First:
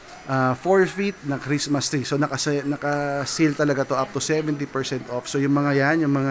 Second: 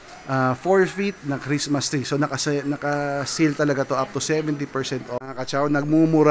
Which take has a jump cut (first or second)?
second